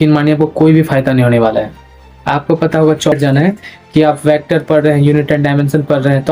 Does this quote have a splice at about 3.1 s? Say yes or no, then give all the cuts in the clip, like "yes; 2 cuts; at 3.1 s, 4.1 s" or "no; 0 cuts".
yes; 1 cut; at 3.1 s